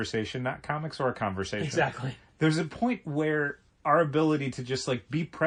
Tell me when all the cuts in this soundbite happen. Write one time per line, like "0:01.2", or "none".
none

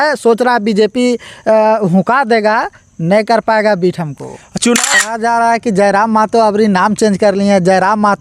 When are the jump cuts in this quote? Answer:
0:04.9

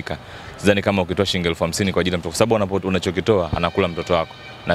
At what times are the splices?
none

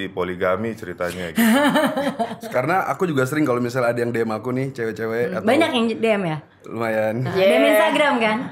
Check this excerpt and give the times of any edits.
0:02.4

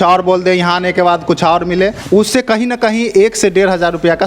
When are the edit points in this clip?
0:02.0

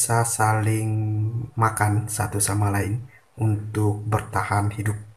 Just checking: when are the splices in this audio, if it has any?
0:01.4

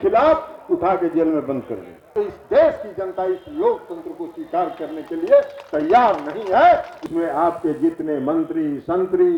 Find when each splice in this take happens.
0:02.1
0:07.1

